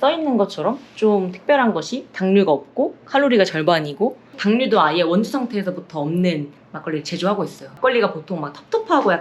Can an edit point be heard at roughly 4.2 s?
yes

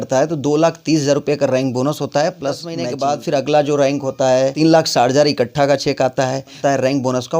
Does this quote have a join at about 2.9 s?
yes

